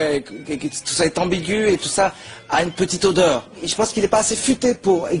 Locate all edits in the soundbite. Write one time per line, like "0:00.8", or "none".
0:03.6

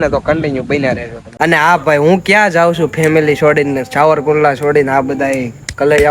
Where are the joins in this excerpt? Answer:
0:01.2

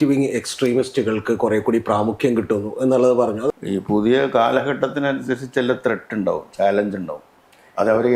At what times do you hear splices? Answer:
0:03.5

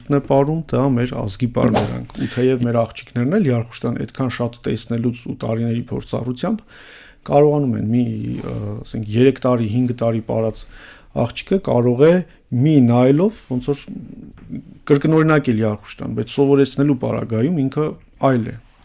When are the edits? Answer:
0:01.7

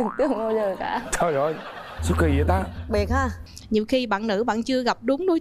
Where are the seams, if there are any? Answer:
0:03.4

